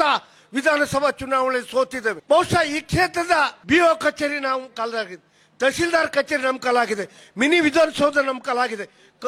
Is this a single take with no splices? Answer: no; 2 cuts; at 2.1 s, 3.6 s

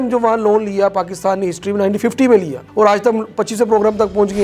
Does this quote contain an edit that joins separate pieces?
no; 0 cuts

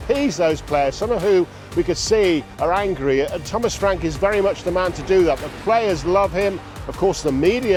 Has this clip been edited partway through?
no; 0 cuts

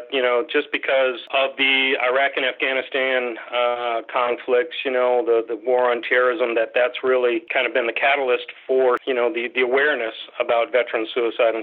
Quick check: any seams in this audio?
yes; 3 cuts; at 1.2 s, 7.5 s, 9.0 s

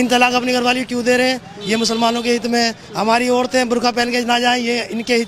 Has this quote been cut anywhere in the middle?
no; 0 cuts

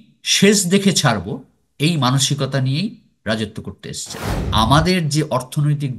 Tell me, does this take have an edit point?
yes; 1 cut; at 4.4 s

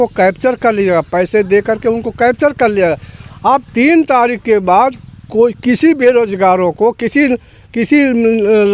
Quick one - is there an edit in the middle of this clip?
no; 0 cuts

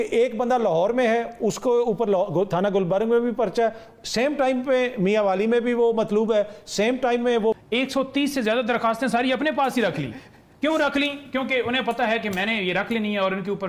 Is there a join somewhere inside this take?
yes; 1 cut; at 7.6 s

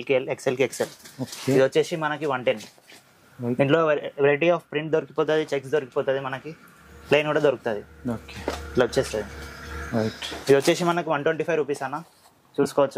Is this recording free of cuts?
yes; 0 cuts

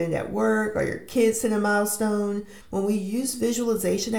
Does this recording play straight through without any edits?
no; 1 cut; at 2.5 s

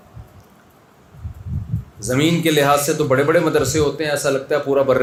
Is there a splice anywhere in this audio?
no; 0 cuts

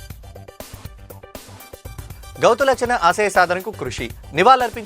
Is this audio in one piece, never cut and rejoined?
yes; 0 cuts

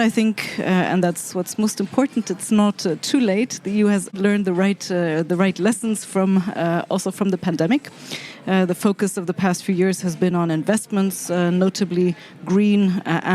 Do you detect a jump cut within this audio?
no; 0 cuts

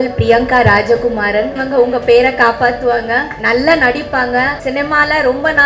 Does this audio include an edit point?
yes; 3 cuts; at 1.6 s, 3.3 s, 4.6 s

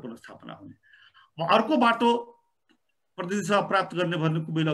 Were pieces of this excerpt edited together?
no; 0 cuts

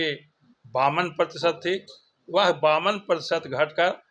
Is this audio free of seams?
yes; 0 cuts

